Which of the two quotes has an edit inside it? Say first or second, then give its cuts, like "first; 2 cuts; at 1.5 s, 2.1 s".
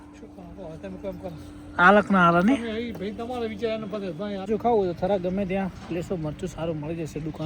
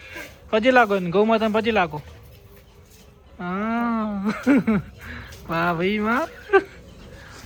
first; 1 cut; at 4.5 s